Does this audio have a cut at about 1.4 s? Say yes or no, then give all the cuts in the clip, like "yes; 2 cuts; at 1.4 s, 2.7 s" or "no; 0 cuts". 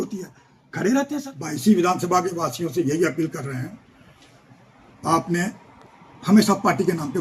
yes; 1 cut; at 1.4 s